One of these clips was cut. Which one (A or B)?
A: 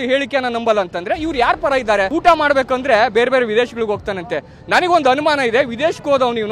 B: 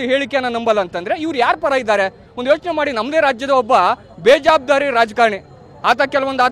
A